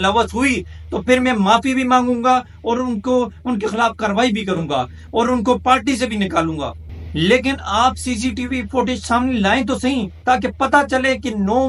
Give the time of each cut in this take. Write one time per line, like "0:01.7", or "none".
none